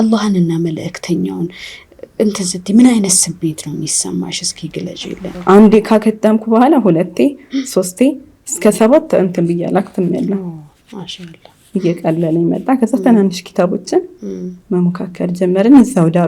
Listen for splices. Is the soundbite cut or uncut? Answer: cut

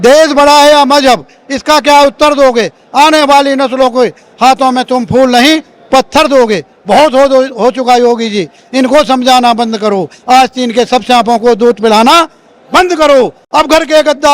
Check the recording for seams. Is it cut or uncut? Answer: uncut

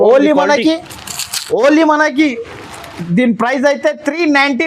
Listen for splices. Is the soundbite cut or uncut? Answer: uncut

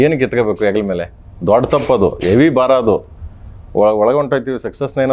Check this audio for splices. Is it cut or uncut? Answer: uncut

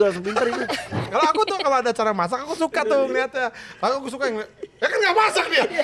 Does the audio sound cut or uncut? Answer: cut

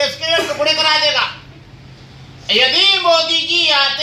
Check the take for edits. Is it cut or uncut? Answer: uncut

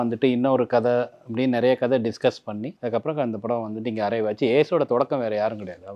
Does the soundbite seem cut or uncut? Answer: cut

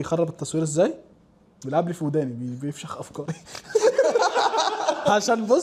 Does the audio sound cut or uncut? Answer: uncut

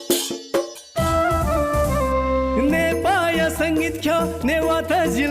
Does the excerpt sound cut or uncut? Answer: cut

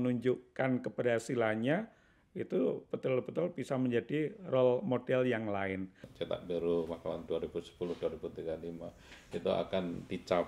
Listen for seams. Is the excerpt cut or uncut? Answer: cut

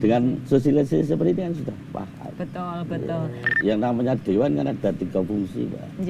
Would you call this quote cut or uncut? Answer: cut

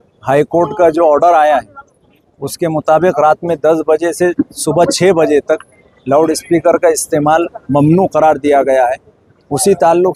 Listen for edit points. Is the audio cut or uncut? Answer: uncut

